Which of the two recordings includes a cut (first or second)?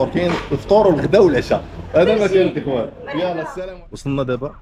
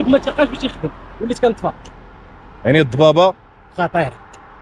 first